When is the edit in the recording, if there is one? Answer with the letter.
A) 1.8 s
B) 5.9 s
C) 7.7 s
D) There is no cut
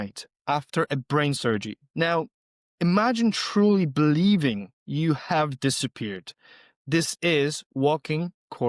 A